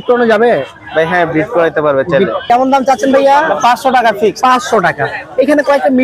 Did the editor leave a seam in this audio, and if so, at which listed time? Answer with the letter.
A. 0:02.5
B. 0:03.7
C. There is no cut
A